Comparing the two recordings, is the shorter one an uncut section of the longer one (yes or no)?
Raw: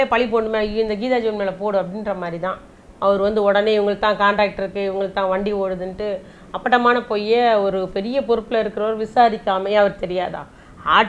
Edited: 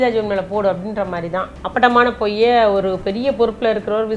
no